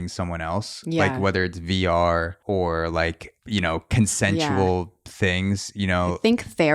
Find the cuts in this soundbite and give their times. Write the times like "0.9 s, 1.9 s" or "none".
2.3 s, 3.3 s, 5.0 s